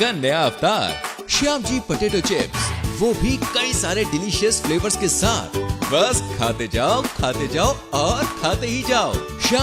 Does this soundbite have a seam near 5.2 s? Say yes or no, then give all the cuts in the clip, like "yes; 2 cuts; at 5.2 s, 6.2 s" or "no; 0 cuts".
no; 0 cuts